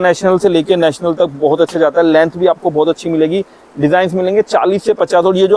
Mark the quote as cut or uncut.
uncut